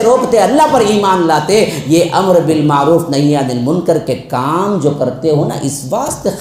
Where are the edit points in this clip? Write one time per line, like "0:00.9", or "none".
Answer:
none